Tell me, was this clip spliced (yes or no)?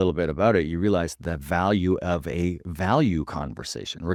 no